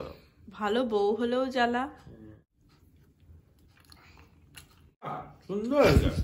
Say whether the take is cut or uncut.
cut